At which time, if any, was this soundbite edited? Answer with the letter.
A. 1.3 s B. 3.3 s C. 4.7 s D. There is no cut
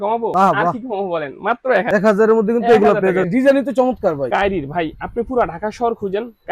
B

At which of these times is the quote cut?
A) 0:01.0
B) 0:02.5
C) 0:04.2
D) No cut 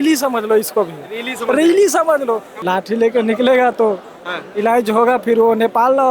B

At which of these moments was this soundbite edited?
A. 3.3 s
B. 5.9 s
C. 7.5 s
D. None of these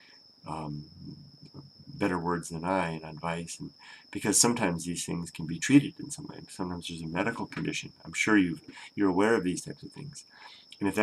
D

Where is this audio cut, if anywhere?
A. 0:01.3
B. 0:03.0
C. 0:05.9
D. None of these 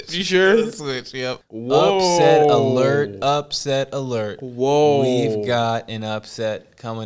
A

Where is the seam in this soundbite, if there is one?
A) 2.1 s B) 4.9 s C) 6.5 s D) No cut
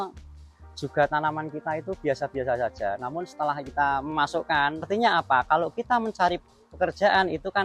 B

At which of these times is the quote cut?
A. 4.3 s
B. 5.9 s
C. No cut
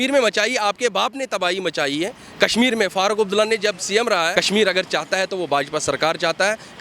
A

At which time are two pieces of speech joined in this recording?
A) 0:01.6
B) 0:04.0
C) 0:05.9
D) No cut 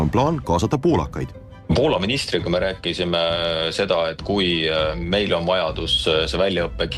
D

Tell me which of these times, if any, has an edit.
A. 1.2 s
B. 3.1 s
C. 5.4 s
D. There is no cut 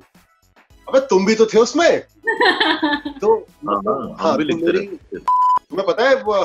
C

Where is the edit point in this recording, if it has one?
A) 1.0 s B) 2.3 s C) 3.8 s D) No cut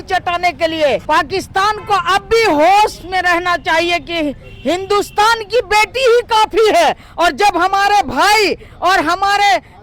A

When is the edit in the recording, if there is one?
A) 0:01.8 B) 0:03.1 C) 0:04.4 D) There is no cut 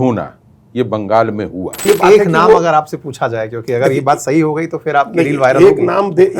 A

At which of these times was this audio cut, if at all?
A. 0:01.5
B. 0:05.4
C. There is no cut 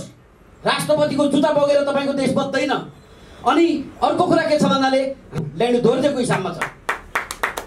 B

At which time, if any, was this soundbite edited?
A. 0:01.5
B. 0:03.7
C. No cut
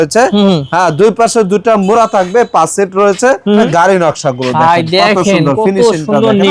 B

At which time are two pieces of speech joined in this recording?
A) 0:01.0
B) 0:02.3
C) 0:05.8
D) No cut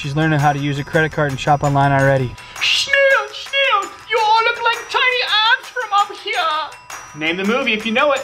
B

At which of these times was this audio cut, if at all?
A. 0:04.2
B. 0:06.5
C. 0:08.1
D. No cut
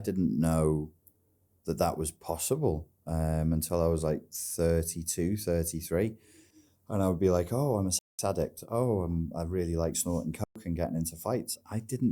D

